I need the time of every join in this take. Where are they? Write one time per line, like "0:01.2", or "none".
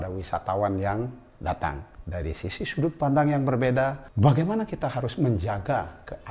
0:01.9
0:04.0